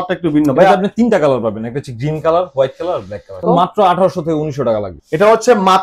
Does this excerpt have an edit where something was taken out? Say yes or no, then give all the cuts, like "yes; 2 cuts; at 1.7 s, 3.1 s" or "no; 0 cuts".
yes; 1 cut; at 3.4 s